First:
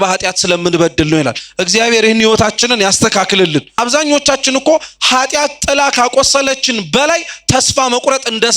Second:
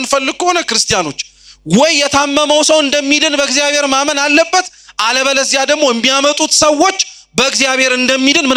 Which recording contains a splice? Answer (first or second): first